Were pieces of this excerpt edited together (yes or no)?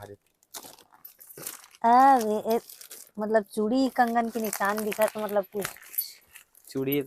no